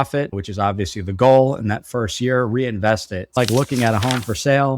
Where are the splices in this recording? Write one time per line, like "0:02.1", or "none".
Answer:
0:03.2